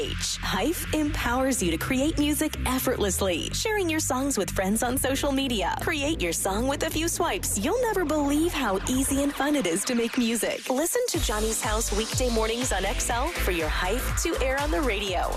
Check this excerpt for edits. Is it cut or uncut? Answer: uncut